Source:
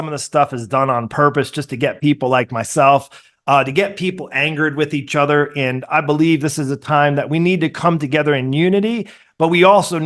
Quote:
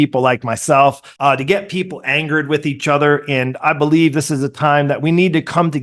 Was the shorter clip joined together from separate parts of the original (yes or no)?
yes